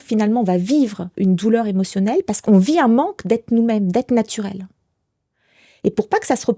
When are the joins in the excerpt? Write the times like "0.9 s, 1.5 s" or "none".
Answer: 1.0 s, 2.4 s